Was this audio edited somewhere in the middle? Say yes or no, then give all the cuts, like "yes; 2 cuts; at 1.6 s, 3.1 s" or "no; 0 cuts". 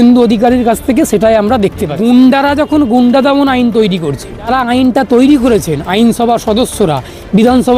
yes; 2 cuts; at 1.9 s, 4.5 s